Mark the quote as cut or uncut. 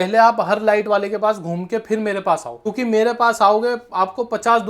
cut